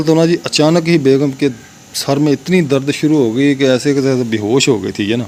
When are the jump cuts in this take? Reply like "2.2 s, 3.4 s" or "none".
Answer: none